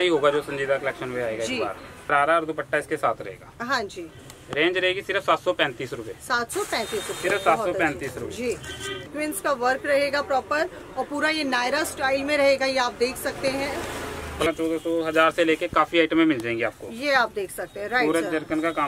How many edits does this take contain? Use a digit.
3